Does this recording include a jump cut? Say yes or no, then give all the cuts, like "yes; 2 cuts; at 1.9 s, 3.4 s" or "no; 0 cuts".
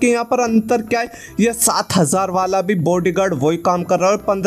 no; 0 cuts